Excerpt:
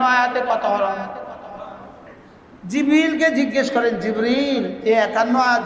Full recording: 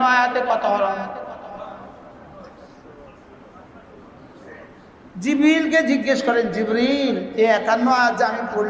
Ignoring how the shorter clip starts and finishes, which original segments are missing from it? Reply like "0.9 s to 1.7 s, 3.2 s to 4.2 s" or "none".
2.1 s to 4.6 s